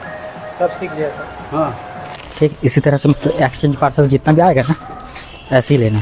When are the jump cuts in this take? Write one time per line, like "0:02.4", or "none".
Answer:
0:02.1